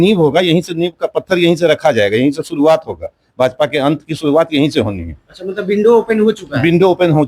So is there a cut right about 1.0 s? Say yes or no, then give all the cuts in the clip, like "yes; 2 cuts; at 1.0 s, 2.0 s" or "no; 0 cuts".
no; 0 cuts